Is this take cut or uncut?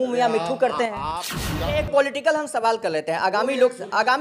cut